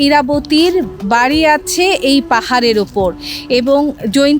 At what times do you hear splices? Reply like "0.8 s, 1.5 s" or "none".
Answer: none